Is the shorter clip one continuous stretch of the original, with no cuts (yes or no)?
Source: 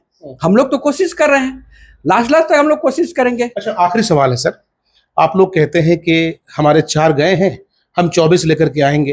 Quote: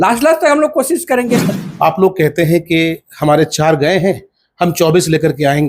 no